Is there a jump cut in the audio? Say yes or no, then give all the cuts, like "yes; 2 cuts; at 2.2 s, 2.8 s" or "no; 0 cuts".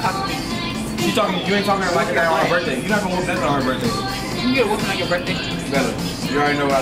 no; 0 cuts